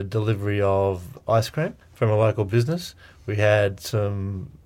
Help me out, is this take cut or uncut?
cut